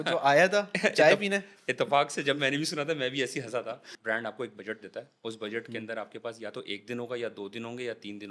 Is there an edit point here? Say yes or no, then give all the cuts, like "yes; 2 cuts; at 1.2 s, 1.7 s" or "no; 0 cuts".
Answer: yes; 1 cut; at 3.9 s